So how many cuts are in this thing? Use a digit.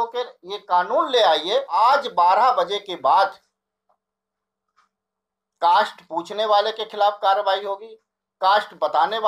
1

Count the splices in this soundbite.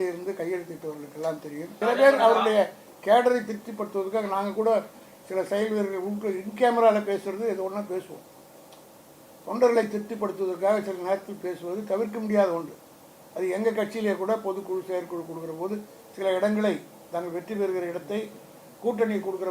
1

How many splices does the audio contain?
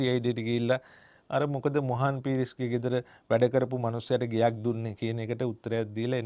0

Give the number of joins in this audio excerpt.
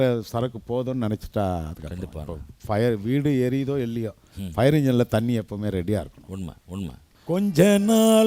1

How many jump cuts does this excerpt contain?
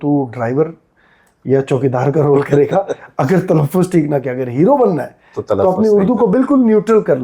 0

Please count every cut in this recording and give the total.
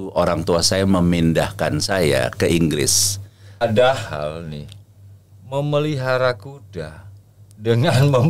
1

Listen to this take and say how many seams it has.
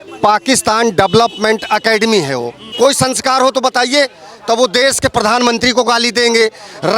1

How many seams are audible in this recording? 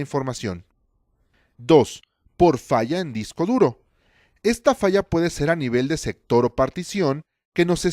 1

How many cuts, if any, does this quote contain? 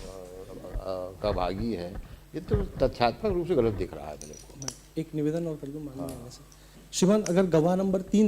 0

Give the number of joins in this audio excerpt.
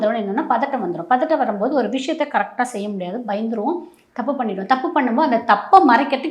0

